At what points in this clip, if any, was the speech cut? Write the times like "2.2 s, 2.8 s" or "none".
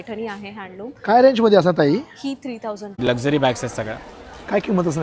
3.1 s